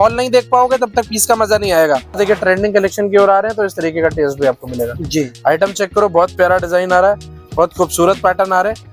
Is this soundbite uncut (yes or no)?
no